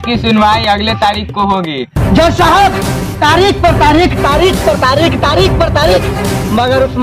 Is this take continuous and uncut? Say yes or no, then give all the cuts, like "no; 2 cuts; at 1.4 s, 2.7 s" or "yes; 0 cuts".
yes; 0 cuts